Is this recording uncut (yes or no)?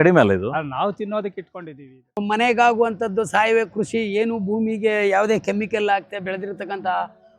no